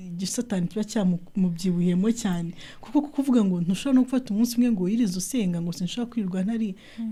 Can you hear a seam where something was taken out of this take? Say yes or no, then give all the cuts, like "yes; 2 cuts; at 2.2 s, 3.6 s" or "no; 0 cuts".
no; 0 cuts